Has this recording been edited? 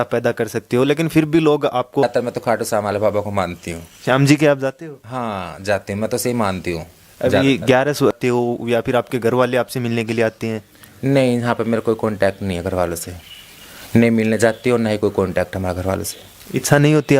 yes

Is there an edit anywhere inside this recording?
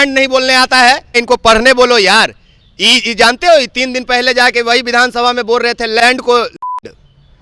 yes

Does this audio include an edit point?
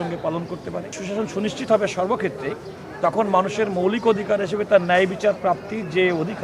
yes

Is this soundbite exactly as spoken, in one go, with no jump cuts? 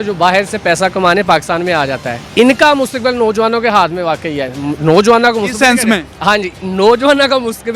no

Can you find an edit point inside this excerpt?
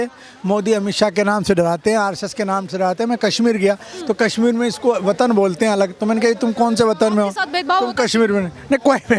no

